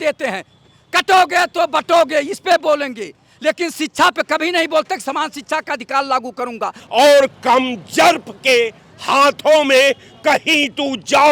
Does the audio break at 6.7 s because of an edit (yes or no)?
yes